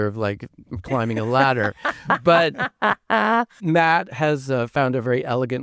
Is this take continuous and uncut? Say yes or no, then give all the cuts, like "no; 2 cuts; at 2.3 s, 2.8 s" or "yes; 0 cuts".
yes; 0 cuts